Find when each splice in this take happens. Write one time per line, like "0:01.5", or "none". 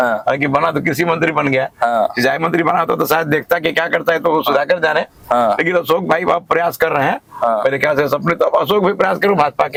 none